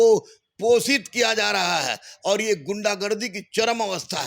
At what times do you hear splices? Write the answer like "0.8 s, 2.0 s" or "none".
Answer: none